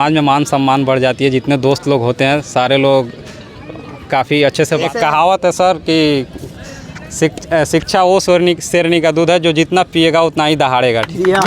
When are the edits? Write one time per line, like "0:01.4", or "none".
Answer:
0:04.8